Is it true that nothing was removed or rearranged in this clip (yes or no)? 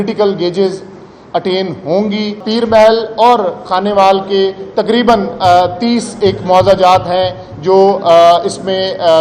no